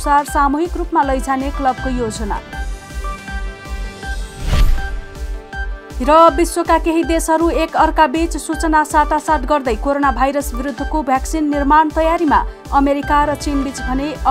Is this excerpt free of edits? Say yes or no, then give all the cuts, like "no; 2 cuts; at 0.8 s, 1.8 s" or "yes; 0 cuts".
yes; 0 cuts